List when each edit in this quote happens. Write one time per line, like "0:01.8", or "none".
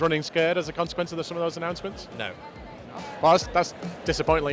0:03.0